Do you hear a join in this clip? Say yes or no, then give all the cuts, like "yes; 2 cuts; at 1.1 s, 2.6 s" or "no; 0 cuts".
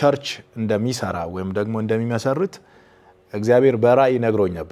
no; 0 cuts